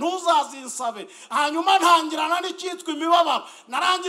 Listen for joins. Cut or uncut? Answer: cut